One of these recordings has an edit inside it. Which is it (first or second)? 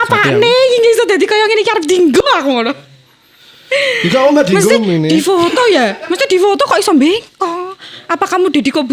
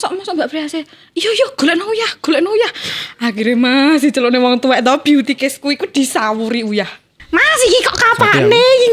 second